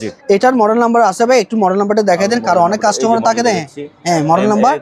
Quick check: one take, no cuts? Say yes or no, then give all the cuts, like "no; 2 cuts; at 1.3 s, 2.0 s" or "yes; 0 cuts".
yes; 0 cuts